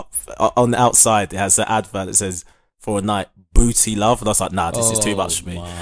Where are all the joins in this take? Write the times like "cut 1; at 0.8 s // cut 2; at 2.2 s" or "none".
none